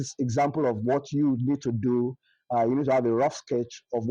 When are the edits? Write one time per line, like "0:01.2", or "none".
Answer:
none

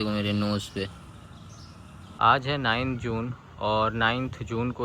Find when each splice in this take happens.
0:02.1

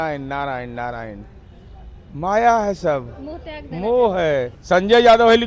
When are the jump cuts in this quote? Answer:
0:04.6

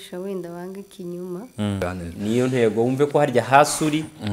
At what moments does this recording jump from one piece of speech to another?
0:01.8

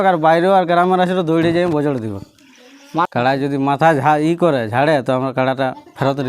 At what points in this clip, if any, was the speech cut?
0:03.1

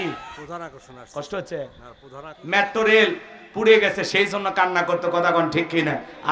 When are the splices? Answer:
0:02.3

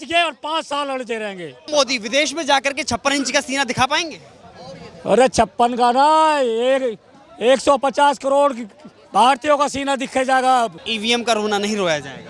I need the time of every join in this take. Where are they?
0:01.7
0:10.9

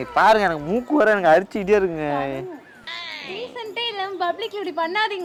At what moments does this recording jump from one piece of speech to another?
none

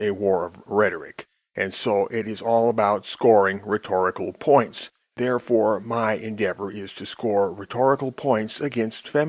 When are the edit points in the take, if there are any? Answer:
none

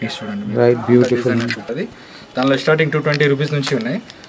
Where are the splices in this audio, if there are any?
0:01.7

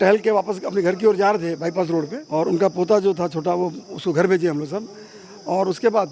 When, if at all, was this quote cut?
0:02.2

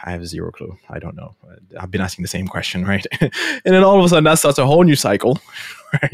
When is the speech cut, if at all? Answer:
none

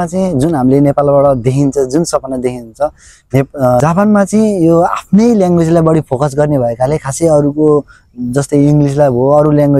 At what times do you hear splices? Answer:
0:03.8

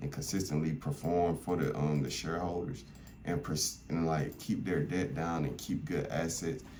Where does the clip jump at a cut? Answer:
none

